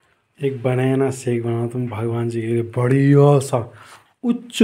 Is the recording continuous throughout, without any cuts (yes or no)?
yes